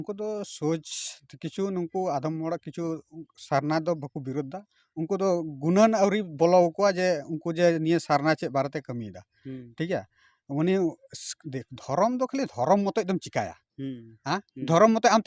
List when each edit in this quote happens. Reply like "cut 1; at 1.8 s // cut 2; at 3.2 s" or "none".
none